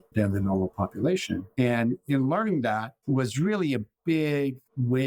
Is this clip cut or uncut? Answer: uncut